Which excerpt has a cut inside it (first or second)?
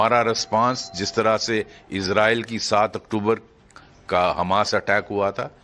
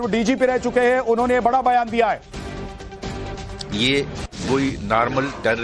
second